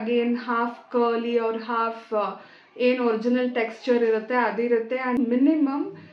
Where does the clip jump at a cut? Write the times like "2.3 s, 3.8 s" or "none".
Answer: 5.2 s